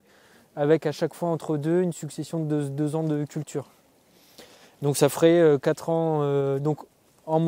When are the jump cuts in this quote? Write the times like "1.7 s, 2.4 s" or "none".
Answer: none